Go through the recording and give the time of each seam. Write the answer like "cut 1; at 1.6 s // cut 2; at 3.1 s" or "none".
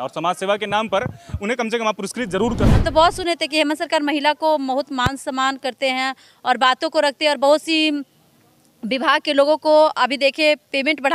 cut 1; at 2.7 s